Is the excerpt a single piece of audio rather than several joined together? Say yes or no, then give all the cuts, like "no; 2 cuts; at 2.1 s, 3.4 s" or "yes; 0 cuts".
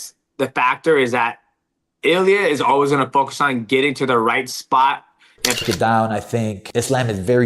no; 1 cut; at 5.6 s